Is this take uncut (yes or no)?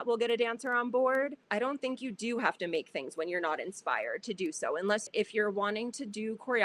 no